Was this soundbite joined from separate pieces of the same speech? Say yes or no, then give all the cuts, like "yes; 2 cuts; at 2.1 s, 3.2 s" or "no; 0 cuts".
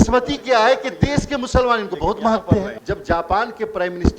yes; 1 cut; at 2.8 s